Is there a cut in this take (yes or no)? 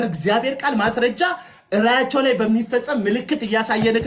no